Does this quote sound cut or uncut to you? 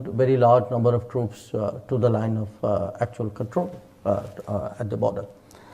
uncut